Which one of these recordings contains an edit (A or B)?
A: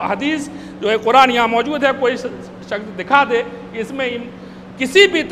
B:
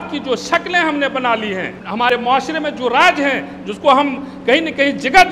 B